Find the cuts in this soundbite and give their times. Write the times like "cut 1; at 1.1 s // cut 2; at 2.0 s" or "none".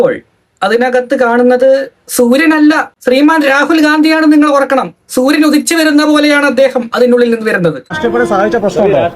cut 1; at 7.9 s